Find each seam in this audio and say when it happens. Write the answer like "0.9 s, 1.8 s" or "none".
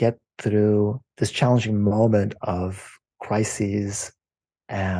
1.0 s

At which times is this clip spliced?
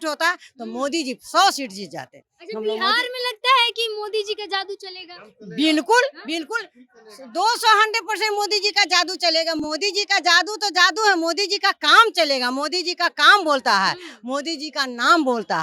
none

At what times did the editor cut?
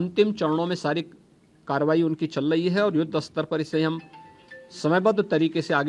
none

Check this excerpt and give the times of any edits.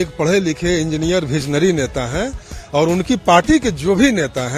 none

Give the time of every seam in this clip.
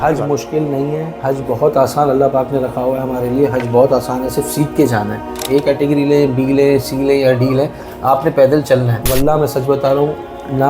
5.4 s, 9.0 s

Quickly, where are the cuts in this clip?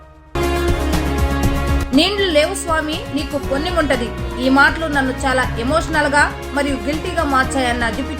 none

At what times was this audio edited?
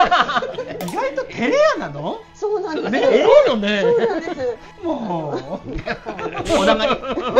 4.7 s

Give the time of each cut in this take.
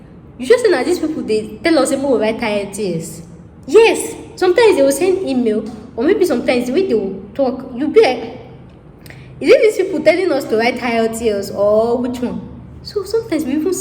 none

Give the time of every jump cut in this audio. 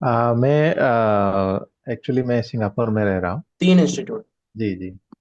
3.4 s

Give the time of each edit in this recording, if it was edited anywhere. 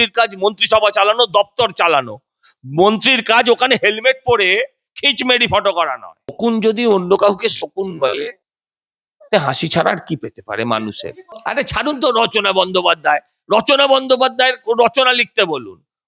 6.4 s, 11.3 s

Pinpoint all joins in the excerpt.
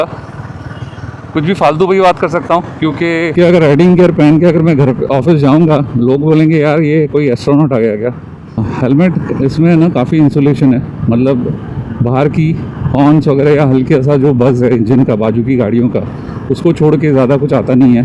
3.3 s, 8.6 s

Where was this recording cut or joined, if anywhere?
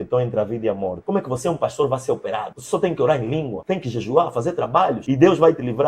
0.9 s, 2.5 s, 3.6 s, 5.0 s

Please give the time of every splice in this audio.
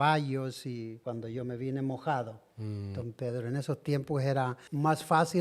0.9 s

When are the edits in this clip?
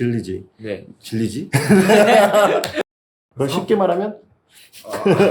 2.7 s

